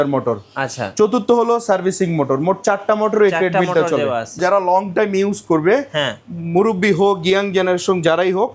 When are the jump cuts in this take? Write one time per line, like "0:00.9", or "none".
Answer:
0:04.4